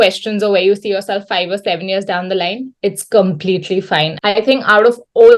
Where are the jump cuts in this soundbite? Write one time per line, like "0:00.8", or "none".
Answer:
0:04.2